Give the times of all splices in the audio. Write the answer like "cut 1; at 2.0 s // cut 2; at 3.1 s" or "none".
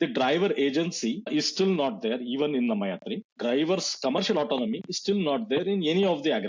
cut 1; at 1.3 s // cut 2; at 3.3 s